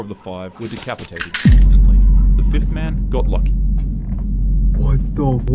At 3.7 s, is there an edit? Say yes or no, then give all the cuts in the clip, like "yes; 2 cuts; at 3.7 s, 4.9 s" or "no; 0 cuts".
no; 0 cuts